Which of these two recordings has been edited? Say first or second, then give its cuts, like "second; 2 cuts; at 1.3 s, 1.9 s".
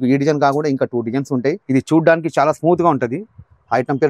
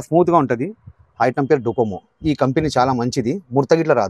first; 1 cut; at 1.6 s